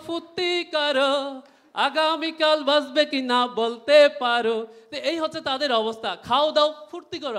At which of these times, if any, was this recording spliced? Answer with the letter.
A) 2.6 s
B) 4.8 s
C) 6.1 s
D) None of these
D